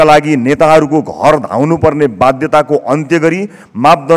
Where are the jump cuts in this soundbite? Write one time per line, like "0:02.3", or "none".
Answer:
none